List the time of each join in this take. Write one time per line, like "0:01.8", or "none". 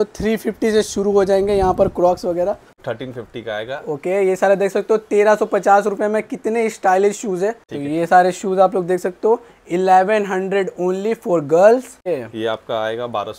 0:02.8
0:07.7
0:12.1